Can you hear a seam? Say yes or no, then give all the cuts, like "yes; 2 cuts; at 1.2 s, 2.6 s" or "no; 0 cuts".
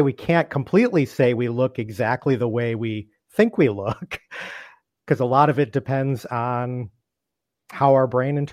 no; 0 cuts